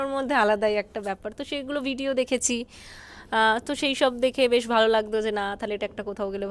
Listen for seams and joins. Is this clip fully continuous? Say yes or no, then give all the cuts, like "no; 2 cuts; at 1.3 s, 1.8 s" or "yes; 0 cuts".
yes; 0 cuts